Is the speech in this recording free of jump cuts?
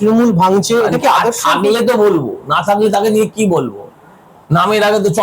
yes; 0 cuts

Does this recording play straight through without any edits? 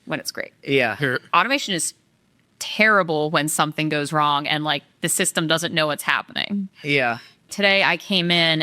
no; 1 cut; at 7.4 s

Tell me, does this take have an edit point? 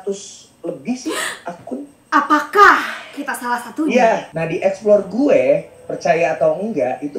yes; 1 cut; at 4.3 s

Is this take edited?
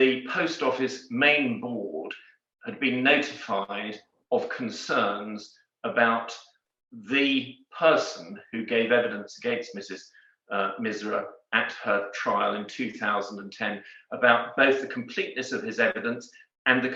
no; 0 cuts

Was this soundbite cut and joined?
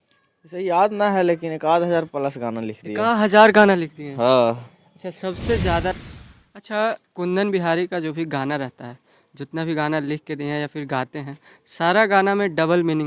yes; 1 cut; at 6.0 s

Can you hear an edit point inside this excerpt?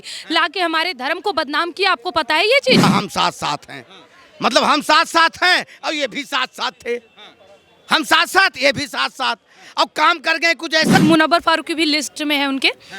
yes; 2 cuts; at 2.8 s, 11.0 s

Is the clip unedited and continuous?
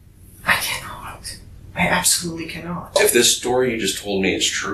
no; 1 cut; at 2.7 s

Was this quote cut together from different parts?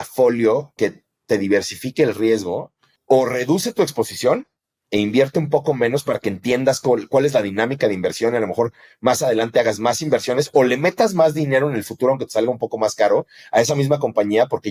no; 0 cuts

